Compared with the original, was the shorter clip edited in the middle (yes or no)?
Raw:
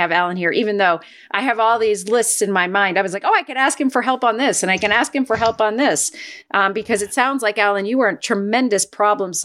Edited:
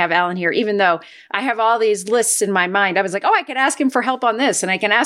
no